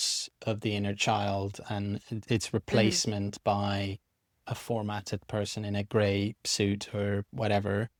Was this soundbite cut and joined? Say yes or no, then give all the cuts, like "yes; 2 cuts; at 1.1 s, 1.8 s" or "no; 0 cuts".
no; 0 cuts